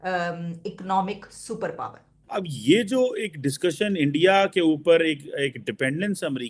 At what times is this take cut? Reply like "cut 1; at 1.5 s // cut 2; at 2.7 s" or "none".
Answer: cut 1; at 2.1 s